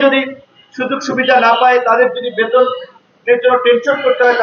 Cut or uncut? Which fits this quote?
uncut